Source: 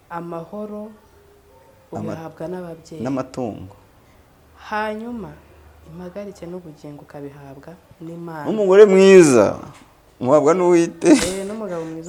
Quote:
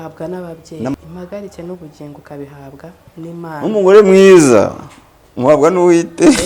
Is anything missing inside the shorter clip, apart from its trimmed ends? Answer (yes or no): yes